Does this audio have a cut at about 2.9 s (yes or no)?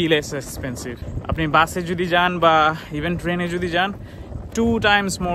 no